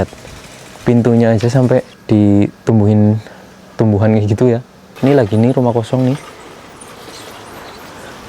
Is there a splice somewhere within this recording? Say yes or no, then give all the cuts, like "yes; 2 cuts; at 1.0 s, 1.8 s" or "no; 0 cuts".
yes; 2 cuts; at 2.0 s, 4.9 s